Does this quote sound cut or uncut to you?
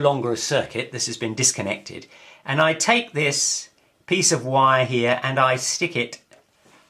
cut